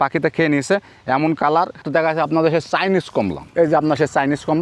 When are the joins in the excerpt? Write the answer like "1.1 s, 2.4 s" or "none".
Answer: 1.8 s, 3.4 s